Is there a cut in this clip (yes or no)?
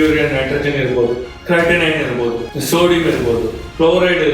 yes